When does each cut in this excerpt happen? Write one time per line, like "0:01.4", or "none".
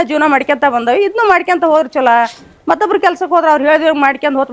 none